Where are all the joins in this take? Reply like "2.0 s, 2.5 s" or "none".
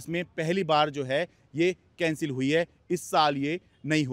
none